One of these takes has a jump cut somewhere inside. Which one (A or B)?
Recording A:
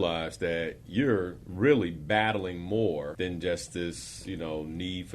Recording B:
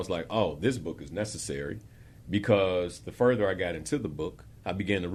A